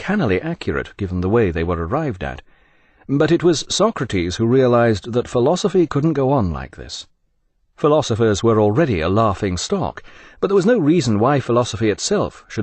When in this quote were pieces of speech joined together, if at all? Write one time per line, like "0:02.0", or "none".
none